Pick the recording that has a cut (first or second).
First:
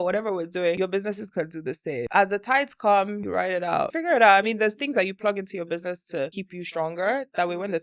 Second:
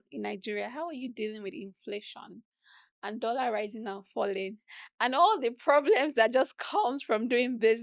first